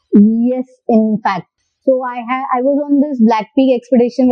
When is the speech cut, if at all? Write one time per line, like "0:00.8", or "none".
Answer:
none